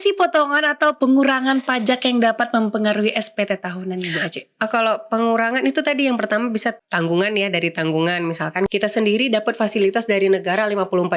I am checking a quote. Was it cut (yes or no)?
yes